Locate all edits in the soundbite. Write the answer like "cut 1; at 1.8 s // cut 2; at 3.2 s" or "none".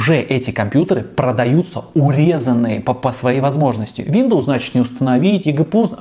none